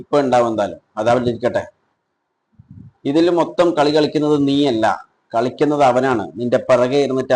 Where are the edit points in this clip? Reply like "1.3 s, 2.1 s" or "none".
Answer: none